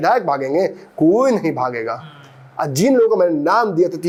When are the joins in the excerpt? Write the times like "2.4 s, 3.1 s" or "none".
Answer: none

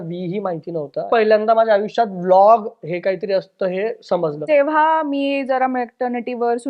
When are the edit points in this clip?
1.1 s, 4.5 s

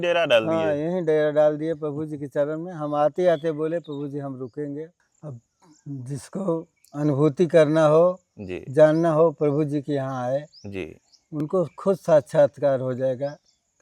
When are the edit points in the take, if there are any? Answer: 5.0 s

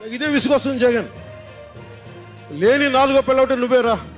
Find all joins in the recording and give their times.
1.1 s, 2.5 s

